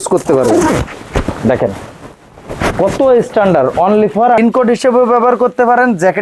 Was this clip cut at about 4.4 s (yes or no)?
yes